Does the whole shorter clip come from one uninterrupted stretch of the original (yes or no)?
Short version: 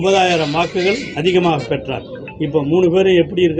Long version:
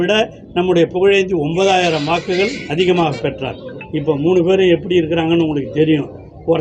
yes